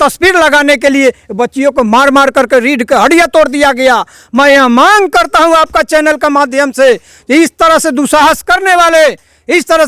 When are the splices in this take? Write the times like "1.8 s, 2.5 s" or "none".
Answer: none